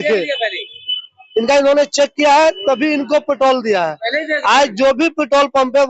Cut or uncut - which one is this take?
uncut